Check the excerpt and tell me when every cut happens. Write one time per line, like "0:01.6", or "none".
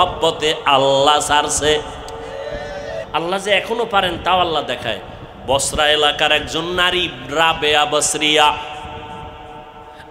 0:03.0